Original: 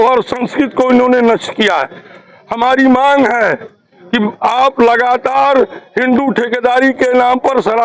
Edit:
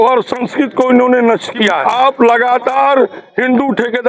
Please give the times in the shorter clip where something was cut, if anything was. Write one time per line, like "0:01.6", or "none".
0:01.8

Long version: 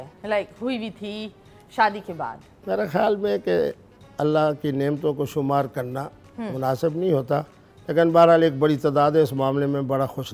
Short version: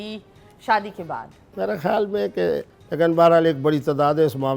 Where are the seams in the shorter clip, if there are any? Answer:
0:02.8

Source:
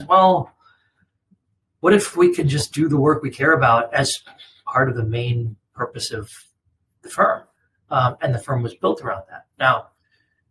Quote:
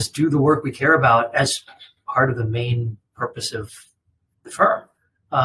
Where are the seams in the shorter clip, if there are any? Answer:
none

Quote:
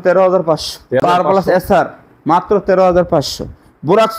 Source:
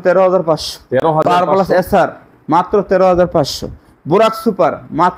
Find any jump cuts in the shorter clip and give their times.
0:01.0

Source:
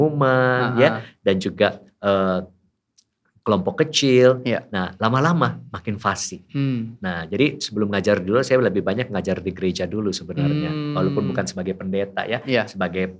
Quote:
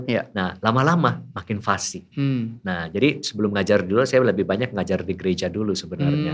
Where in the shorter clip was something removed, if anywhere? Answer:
none

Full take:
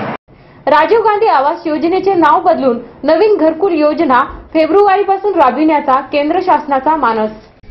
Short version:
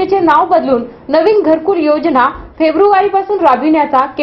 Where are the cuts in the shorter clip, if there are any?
none

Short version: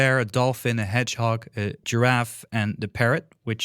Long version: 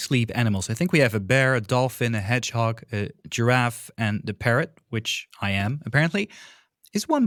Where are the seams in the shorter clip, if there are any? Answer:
0:01.8

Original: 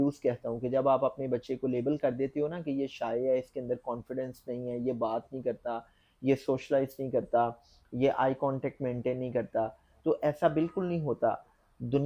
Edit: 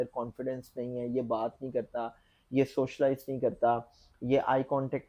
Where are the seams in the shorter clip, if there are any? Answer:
none

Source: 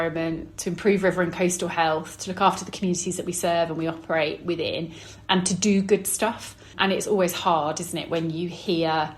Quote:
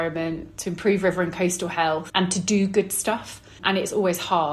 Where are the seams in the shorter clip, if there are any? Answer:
0:02.1

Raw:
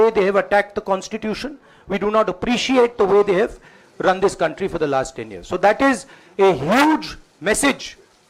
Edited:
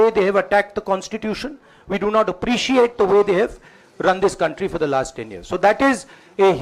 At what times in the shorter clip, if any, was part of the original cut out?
none

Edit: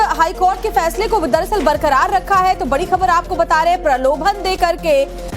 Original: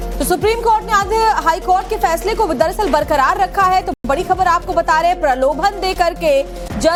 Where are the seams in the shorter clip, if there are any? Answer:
0:02.6

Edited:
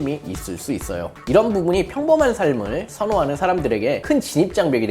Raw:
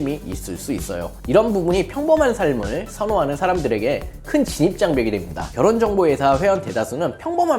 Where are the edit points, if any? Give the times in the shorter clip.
0:04.0

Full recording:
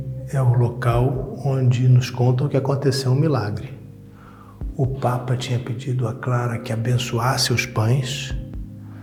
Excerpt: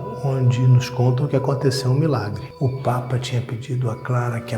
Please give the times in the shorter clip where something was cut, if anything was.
0:02.4

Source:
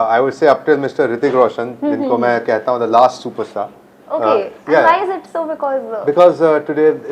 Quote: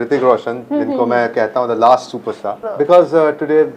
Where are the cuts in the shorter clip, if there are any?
0:02.6

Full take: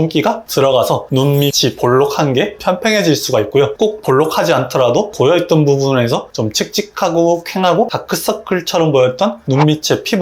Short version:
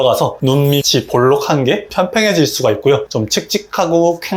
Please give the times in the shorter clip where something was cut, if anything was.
0:03.0

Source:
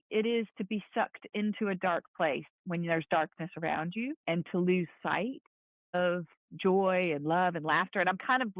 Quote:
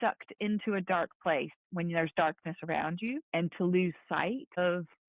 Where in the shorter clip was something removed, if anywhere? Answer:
0:04.0

